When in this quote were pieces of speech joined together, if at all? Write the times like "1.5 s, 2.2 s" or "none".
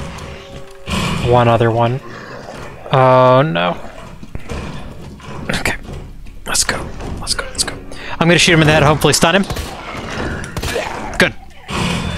none